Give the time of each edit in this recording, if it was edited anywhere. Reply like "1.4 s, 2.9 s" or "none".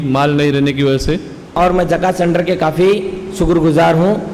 1.5 s

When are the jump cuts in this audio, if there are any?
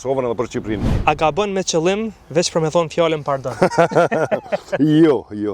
1.0 s

